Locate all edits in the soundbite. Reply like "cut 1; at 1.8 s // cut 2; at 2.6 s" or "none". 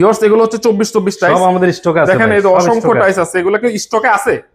none